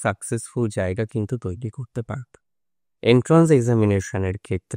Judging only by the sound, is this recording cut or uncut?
uncut